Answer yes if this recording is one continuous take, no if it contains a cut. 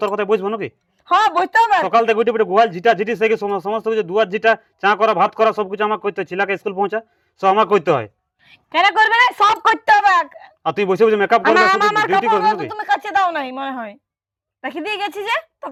yes